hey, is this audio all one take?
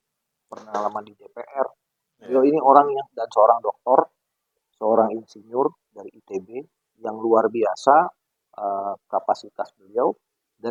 yes; 0 cuts

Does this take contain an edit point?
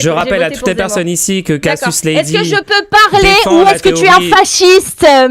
no; 0 cuts

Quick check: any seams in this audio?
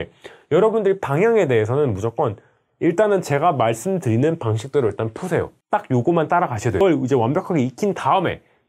yes; 2 cuts; at 5.6 s, 6.8 s

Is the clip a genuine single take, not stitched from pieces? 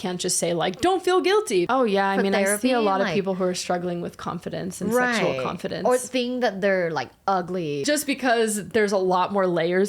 no; 2 cuts; at 1.7 s, 7.8 s

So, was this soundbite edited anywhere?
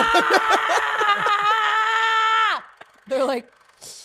no; 0 cuts

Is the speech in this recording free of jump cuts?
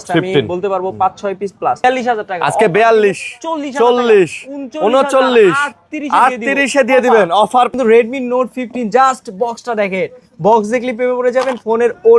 no; 2 cuts; at 1.8 s, 7.7 s

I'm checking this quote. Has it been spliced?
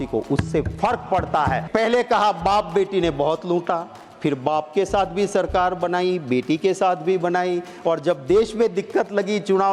yes; 1 cut; at 1.6 s

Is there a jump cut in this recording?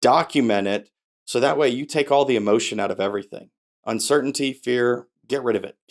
no; 0 cuts

